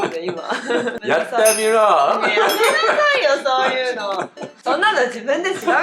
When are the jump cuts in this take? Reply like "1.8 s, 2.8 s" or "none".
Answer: 1.0 s, 4.5 s